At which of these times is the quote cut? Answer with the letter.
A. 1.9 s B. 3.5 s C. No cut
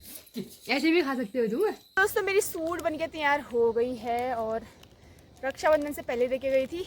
A